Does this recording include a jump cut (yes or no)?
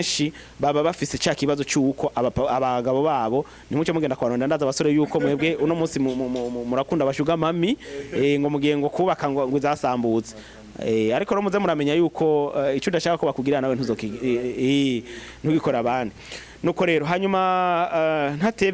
no